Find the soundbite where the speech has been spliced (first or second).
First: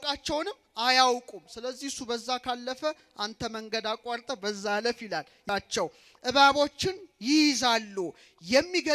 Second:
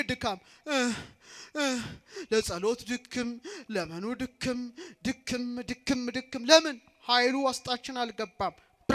first